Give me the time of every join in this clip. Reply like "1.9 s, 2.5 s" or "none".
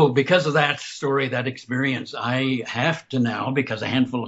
none